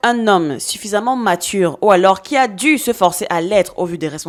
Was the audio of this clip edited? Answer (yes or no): no